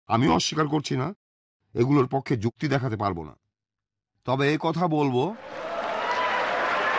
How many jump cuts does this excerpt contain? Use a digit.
0